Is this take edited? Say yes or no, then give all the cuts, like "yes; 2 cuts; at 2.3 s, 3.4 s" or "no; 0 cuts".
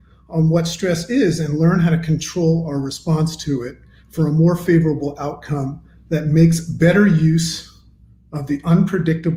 no; 0 cuts